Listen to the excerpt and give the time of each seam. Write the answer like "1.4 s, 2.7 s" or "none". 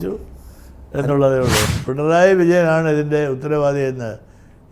1.7 s